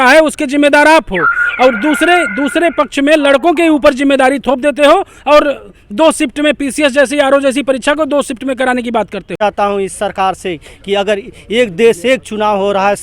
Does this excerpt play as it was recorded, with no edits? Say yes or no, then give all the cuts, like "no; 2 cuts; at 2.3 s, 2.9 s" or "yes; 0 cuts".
no; 1 cut; at 9.4 s